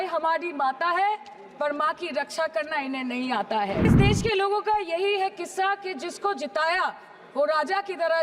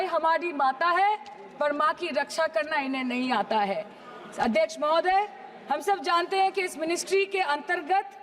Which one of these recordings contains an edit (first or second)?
first